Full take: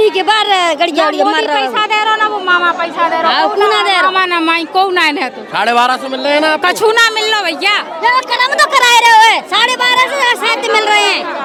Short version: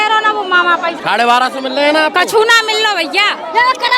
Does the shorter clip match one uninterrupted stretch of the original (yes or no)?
no